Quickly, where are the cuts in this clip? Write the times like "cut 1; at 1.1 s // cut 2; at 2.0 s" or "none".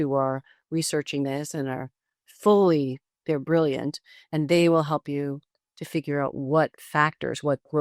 none